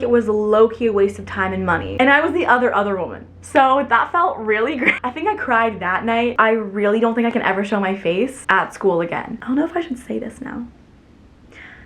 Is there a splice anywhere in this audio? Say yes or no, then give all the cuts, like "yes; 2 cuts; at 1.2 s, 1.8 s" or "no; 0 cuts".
yes; 4 cuts; at 2.0 s, 5.0 s, 6.3 s, 9.3 s